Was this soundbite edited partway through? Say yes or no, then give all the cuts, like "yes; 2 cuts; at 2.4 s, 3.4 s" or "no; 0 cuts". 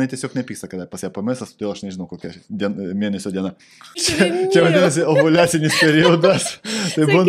yes; 1 cut; at 4.0 s